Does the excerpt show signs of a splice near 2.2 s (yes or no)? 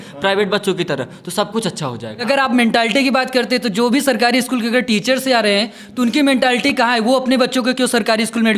yes